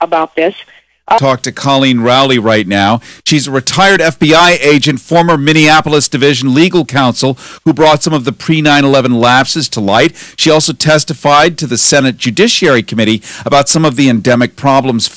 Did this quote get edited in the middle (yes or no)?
yes